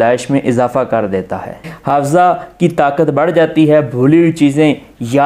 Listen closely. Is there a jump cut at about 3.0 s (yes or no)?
no